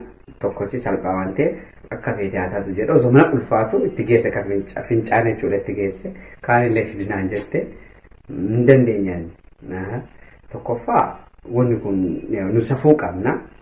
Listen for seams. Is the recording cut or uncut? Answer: uncut